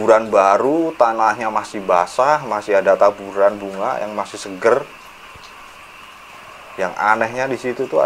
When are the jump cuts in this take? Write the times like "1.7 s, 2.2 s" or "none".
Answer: none